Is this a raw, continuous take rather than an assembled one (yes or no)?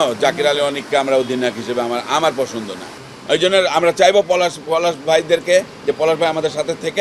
no